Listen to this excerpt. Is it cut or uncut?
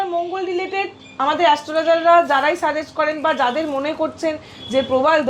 uncut